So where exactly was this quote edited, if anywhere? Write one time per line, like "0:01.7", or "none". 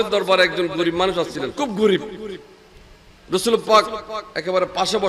0:01.5